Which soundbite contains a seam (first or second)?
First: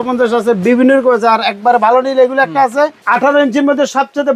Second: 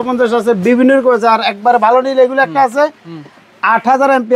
first